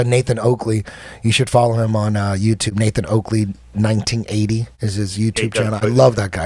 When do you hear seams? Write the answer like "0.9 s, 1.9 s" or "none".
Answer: none